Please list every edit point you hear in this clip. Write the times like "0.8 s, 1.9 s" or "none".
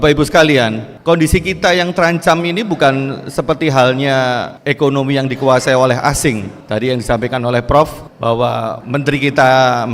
0.9 s, 4.6 s, 6.5 s, 8.6 s